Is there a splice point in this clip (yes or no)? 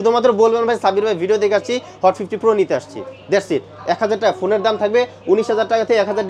no